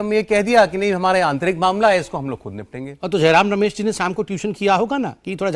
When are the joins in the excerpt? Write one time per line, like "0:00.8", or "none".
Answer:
none